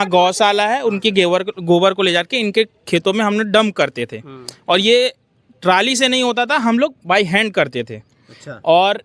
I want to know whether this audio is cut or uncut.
uncut